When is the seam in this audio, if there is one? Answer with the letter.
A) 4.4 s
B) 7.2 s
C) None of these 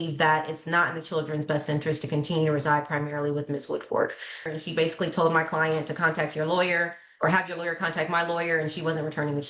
A